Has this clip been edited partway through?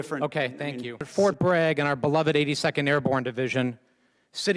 yes; 1 cut; at 1.1 s

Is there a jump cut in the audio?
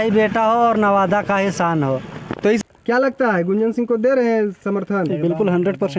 yes; 1 cut; at 2.6 s

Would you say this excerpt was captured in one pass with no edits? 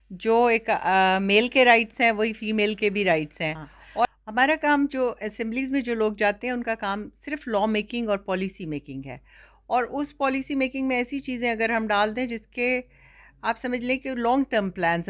no; 1 cut; at 4.0 s

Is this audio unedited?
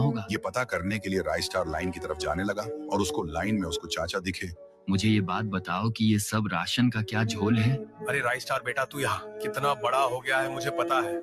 yes; 0 cuts

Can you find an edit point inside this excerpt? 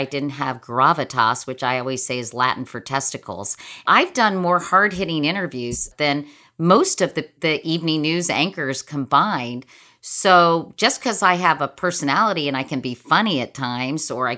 yes; 3 cuts; at 3.8 s, 5.9 s, 7.3 s

